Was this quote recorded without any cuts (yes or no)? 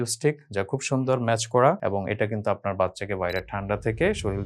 yes